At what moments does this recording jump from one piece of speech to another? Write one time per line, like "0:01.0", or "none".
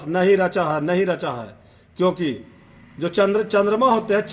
none